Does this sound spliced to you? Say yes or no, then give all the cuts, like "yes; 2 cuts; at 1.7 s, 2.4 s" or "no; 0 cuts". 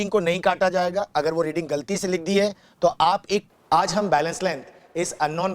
yes; 1 cut; at 3.5 s